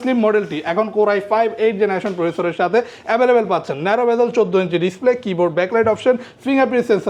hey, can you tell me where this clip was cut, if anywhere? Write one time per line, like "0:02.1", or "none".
none